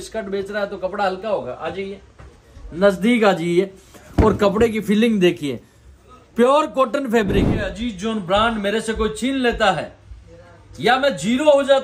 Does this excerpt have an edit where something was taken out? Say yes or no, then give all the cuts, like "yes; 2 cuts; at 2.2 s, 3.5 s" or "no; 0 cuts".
yes; 1 cut; at 7.7 s